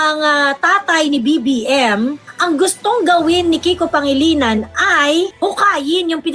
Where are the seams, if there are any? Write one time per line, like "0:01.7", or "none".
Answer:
0:02.2